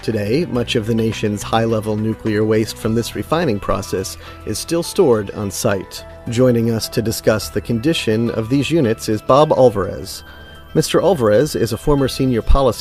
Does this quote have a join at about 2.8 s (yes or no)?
no